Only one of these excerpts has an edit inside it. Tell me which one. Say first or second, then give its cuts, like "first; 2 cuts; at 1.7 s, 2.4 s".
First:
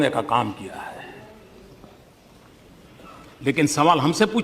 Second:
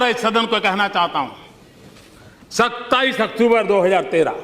second; 1 cut; at 1.5 s